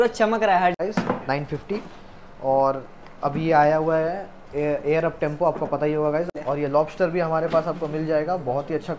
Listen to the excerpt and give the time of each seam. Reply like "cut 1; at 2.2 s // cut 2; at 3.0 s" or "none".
cut 1; at 0.8 s // cut 2; at 6.3 s

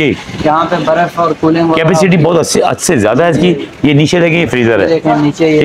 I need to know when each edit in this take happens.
none

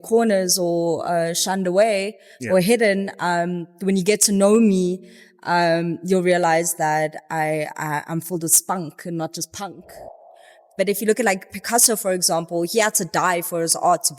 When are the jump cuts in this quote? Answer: cut 1; at 10.3 s

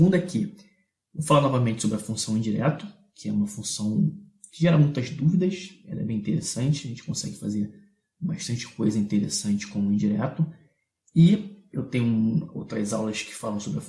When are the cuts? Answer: none

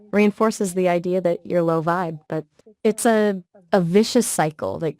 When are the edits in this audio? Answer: cut 1; at 2.6 s // cut 2; at 3.5 s

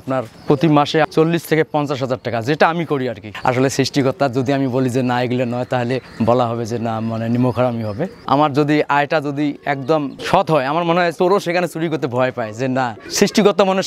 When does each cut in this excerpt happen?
cut 1; at 3.3 s // cut 2; at 8.2 s // cut 3; at 10.2 s // cut 4; at 11.1 s // cut 5; at 13.0 s

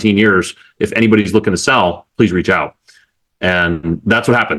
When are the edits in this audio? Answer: none

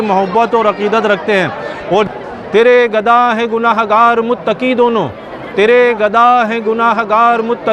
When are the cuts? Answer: cut 1; at 2.1 s

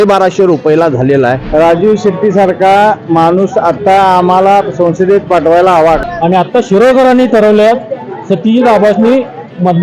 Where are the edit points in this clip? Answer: cut 1; at 1.4 s // cut 2; at 6.0 s

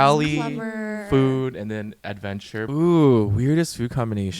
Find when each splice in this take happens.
cut 1; at 2.7 s

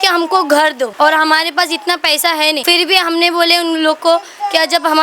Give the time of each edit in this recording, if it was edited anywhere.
cut 1; at 0.9 s // cut 2; at 2.6 s

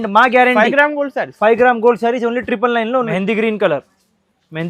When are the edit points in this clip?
cut 1; at 3.1 s

